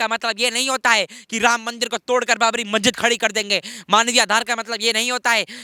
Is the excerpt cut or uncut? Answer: uncut